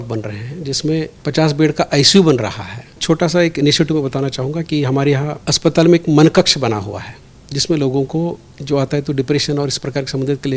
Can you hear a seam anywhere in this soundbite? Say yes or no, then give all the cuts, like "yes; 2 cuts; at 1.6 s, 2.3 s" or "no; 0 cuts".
yes; 3 cuts; at 1.1 s, 3.0 s, 5.4 s